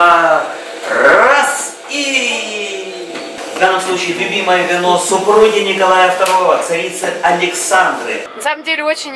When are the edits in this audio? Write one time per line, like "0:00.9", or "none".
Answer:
0:03.4
0:08.2